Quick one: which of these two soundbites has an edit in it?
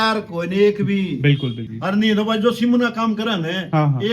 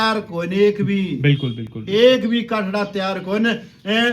first; 1 cut; at 1.7 s

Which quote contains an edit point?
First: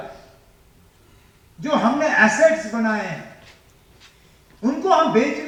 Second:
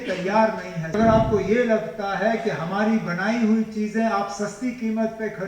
second; 1 cut; at 0.9 s

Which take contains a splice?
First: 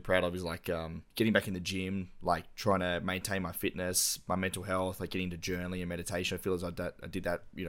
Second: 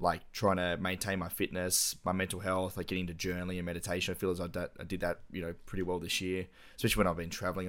first; 1 cut; at 1.0 s

